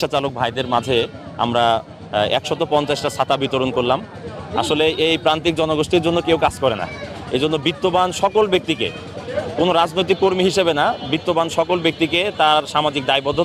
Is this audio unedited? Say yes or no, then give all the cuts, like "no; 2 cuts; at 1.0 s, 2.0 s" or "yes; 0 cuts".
yes; 0 cuts